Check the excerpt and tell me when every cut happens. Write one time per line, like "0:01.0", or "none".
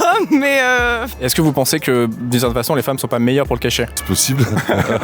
0:01.1
0:04.0